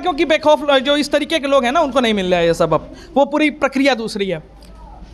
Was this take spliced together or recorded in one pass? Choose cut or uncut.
uncut